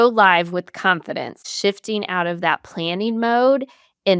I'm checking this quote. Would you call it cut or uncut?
cut